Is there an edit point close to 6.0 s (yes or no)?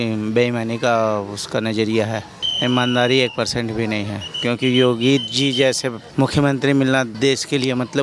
yes